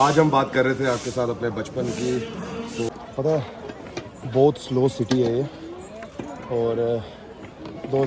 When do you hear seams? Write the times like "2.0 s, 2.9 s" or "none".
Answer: 2.9 s